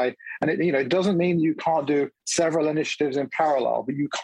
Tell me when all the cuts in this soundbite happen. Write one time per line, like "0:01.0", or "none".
none